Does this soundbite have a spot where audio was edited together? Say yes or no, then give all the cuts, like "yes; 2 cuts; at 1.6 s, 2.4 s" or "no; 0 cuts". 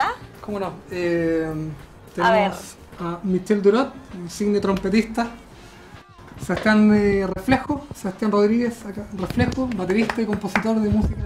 no; 0 cuts